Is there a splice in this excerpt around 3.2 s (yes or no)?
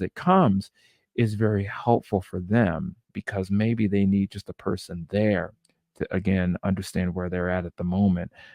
yes